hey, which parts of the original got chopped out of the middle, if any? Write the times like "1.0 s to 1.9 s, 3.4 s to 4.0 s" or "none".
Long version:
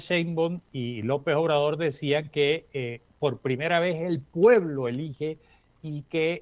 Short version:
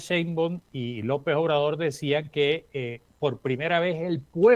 none

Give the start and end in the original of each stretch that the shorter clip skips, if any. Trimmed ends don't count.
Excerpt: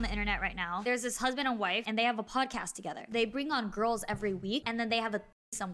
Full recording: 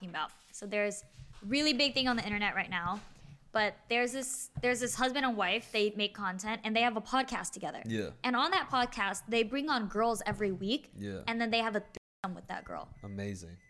3.0 s to 4.6 s, 5.6 s to 6.6 s, 7.8 s to 9.2 s, 10.8 s to 11.3 s

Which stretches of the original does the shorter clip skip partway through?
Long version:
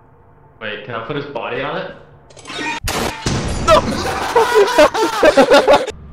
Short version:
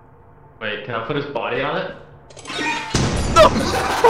2.8 s to 3.1 s

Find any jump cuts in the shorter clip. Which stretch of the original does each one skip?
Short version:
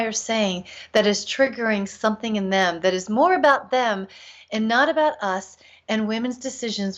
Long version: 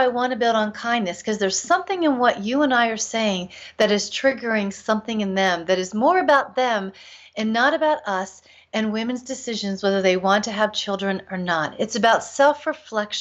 none

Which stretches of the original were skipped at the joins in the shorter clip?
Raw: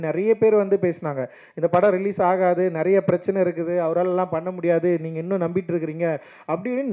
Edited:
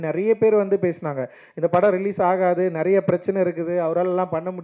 none

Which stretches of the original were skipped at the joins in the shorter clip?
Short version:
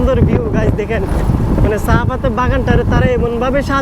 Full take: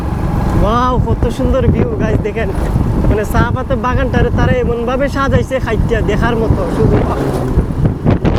none

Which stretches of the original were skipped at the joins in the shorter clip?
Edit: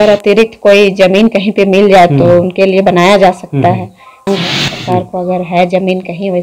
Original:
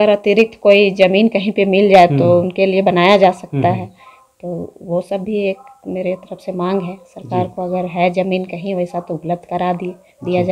4.3 s to 6.7 s

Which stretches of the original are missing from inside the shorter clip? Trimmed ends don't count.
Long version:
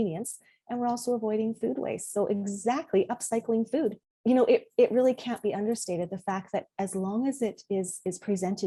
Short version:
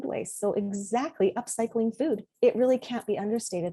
4.0 s to 4.7 s

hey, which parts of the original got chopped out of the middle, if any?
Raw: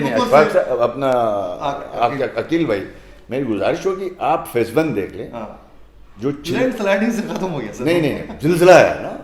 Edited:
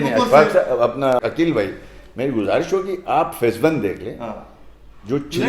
1.2 s to 2.3 s

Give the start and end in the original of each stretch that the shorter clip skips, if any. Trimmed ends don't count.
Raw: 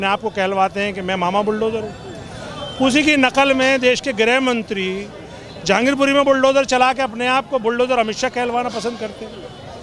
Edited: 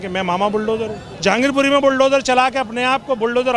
2.0 s to 5.5 s

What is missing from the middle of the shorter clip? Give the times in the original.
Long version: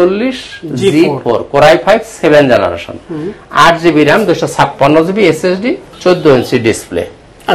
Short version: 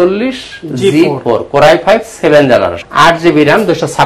2.8 s to 3.4 s

